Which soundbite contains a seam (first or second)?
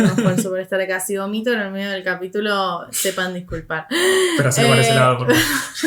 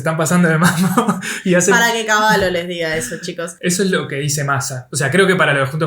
second